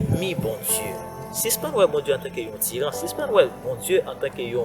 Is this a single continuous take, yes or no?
no